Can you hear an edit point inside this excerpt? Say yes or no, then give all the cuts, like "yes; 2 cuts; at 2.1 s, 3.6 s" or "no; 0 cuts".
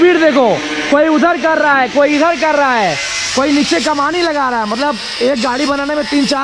no; 0 cuts